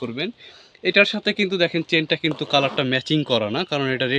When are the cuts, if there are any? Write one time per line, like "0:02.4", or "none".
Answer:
none